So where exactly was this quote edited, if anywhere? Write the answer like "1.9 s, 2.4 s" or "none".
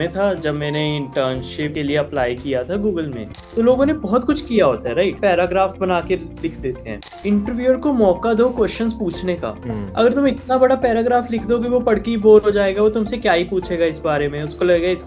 1.7 s, 3.5 s, 5.2 s, 7.0 s